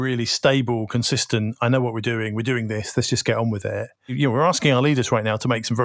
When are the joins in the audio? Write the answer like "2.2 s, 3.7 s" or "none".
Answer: 4.1 s